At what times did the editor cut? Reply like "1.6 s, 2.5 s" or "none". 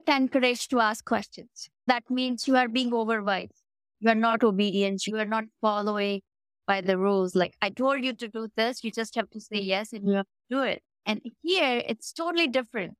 1.9 s